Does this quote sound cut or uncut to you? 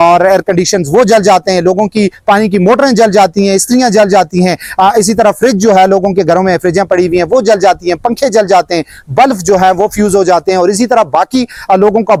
uncut